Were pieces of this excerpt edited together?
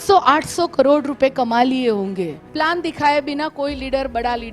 yes; 1 cut; at 2.4 s

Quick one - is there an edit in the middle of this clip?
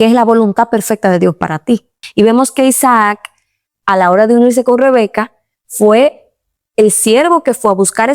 yes; 1 cut; at 2.0 s

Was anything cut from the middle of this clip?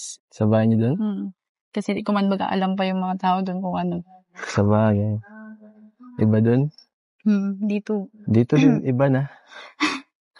yes; 1 cut; at 7.6 s

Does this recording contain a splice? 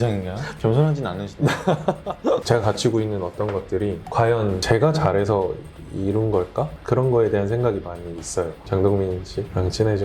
yes; 2 cuts; at 2.4 s, 8.6 s

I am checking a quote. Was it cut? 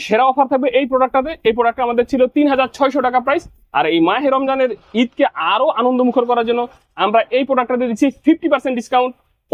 no; 0 cuts

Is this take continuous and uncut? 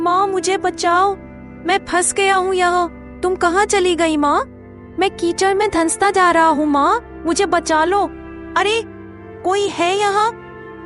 yes; 0 cuts

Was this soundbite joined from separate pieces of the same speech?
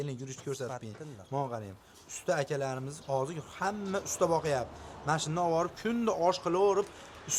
no; 0 cuts

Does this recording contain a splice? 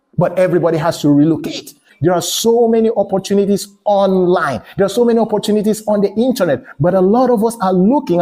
yes; 1 cut; at 1.9 s

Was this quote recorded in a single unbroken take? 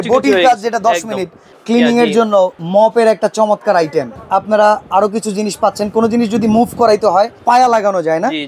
no; 4 cuts; at 1.4 s, 2.6 s, 4.2 s, 7.4 s

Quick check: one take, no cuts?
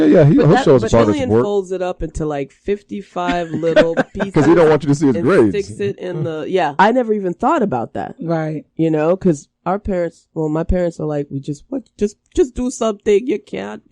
no; 1 cut; at 6.7 s

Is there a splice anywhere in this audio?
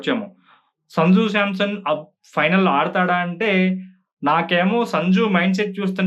no; 0 cuts

